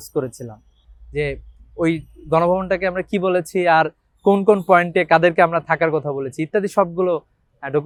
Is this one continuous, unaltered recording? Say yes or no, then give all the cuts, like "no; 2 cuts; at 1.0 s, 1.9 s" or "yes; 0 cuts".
yes; 0 cuts